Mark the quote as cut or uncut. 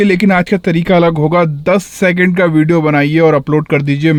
uncut